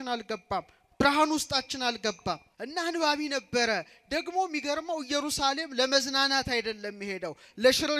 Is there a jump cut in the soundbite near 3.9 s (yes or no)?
no